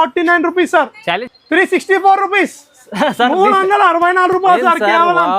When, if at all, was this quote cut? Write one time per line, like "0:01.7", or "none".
0:01.2